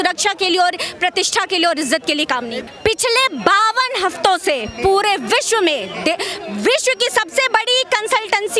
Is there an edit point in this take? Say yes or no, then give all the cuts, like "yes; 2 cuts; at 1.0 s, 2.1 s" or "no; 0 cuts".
yes; 1 cut; at 2.6 s